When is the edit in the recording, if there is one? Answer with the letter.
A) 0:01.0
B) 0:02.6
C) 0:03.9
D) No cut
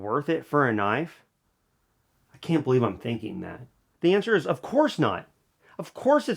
C